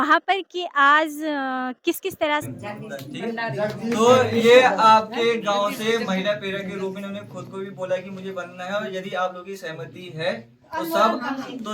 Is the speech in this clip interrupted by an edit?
yes; 1 cut; at 2.4 s

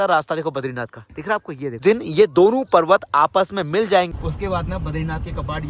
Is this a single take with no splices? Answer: no; 2 cuts; at 1.8 s, 4.1 s

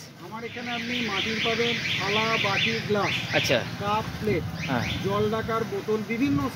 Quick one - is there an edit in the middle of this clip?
no; 0 cuts

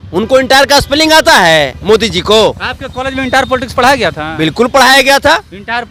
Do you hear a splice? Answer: no; 0 cuts

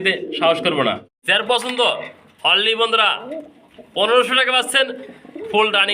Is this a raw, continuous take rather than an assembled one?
no; 1 cut; at 1.1 s

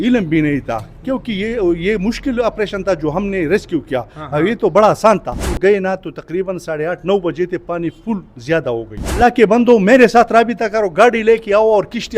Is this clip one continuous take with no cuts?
no; 2 cuts; at 5.5 s, 9.2 s

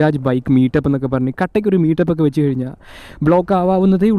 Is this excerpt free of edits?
yes; 0 cuts

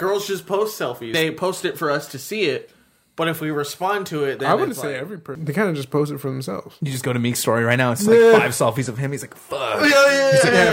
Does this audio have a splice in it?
yes; 3 cuts; at 1.1 s, 5.3 s, 6.7 s

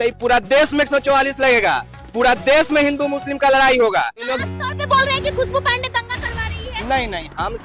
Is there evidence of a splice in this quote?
yes; 1 cut; at 4.3 s

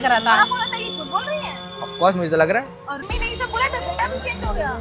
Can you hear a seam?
yes; 1 cut; at 3.0 s

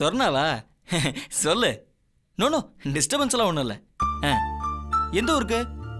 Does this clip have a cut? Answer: no; 0 cuts

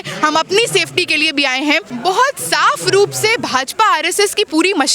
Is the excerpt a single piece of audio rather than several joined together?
no; 1 cut; at 1.9 s

